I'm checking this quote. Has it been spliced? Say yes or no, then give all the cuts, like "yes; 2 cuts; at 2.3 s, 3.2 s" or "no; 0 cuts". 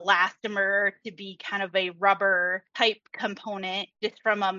yes; 1 cut; at 2.6 s